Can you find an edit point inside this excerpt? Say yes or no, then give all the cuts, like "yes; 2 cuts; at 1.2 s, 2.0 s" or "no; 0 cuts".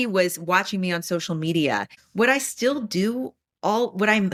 no; 0 cuts